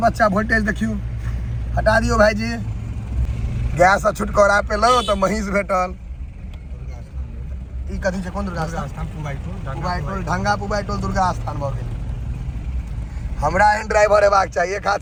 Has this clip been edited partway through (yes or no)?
no